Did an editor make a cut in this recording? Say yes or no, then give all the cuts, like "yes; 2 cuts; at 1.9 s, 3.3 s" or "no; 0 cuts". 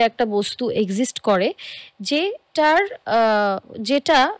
no; 0 cuts